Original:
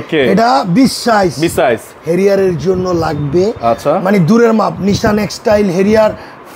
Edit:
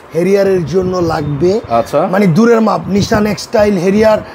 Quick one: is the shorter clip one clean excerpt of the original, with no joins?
yes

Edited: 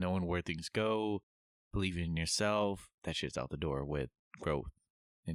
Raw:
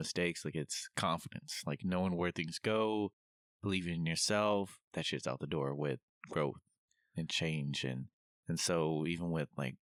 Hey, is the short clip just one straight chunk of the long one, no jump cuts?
yes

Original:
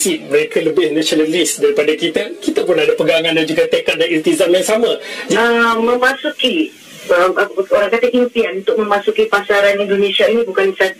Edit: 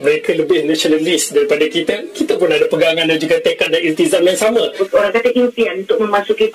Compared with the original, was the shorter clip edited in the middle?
yes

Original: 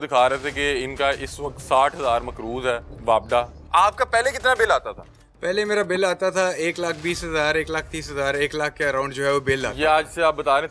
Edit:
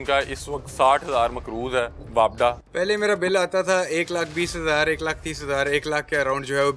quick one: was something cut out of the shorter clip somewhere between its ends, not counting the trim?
yes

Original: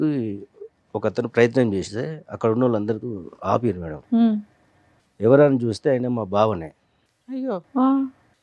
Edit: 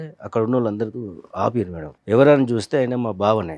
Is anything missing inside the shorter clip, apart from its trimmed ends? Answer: yes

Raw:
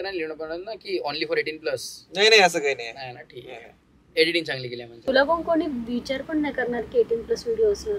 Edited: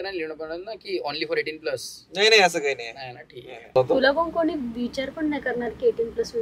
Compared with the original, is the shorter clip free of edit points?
no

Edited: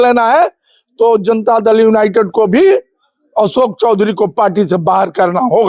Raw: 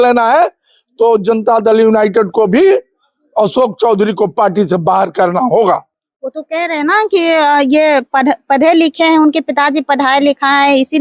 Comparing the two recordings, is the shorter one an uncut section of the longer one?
yes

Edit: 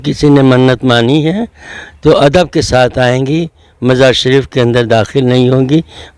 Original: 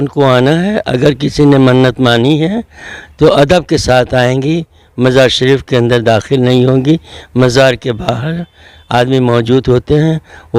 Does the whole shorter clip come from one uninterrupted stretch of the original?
yes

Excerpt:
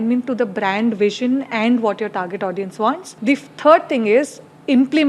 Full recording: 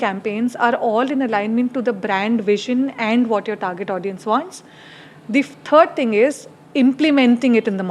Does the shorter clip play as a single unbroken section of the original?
no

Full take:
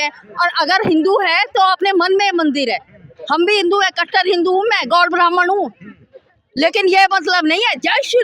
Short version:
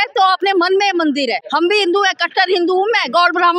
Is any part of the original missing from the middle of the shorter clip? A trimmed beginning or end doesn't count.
yes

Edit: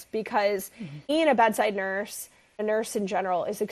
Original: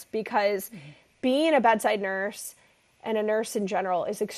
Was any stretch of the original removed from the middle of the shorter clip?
yes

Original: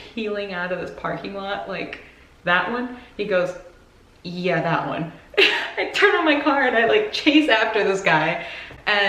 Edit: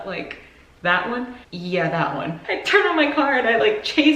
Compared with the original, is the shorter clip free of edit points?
no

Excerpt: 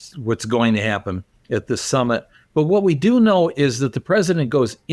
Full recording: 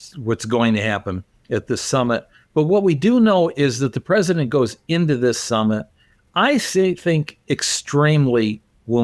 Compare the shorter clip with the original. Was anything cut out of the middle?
no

